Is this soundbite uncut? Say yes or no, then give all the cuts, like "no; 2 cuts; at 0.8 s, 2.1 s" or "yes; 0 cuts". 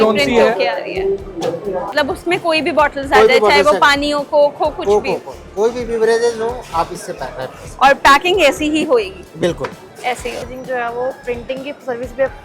no; 2 cuts; at 1.9 s, 10.4 s